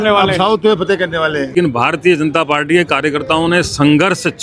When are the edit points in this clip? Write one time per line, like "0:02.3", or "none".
0:01.5